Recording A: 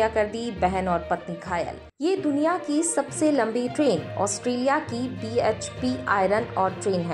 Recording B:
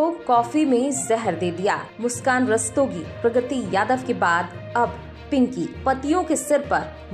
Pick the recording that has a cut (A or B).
A